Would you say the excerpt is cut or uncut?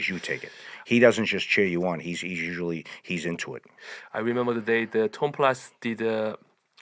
uncut